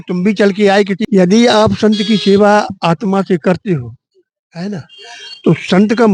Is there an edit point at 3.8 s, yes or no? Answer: no